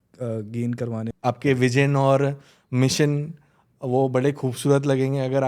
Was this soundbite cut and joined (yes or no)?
yes